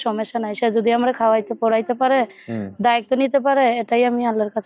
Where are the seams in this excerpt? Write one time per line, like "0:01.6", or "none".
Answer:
none